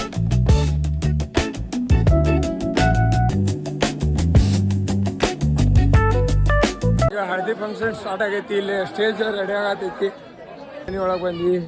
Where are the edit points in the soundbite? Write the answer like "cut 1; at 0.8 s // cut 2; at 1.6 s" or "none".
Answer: cut 1; at 3.3 s // cut 2; at 10.9 s